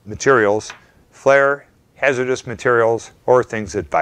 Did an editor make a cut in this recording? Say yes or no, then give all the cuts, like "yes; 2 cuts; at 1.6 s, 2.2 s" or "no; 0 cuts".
no; 0 cuts